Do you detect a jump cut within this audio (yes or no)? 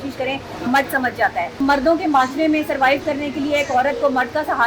yes